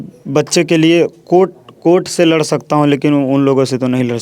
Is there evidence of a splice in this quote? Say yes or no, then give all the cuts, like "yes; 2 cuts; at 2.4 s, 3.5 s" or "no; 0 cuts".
no; 0 cuts